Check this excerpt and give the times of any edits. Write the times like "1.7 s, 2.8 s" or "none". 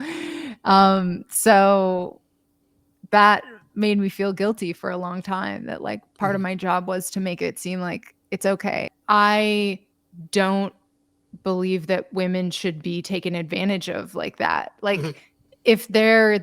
8.9 s